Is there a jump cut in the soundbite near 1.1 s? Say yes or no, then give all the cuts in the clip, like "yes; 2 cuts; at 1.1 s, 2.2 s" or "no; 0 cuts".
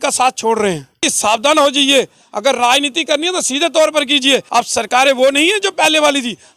yes; 2 cuts; at 1.1 s, 4.5 s